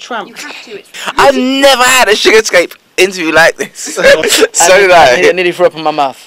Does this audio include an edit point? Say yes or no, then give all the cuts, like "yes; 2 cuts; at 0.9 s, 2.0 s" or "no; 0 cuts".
yes; 2 cuts; at 0.9 s, 4.2 s